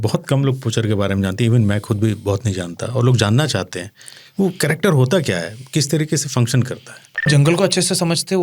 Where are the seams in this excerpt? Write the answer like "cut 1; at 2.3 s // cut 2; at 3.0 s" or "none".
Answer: cut 1; at 7.3 s